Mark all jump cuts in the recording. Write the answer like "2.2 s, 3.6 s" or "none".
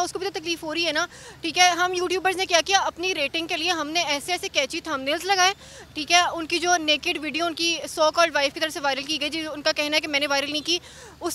none

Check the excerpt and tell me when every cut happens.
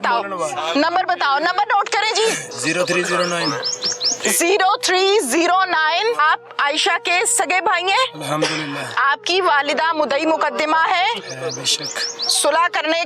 2.5 s, 6.2 s

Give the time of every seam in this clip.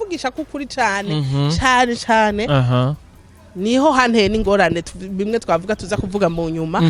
none

